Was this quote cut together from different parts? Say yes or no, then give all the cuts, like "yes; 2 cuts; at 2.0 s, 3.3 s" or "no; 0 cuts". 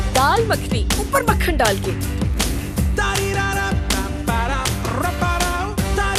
no; 0 cuts